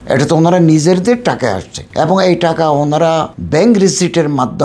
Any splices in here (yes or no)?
no